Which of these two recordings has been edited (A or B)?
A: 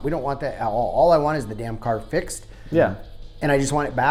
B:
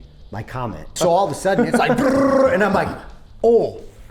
B